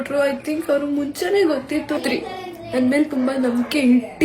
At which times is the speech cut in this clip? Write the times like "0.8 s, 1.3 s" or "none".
2.0 s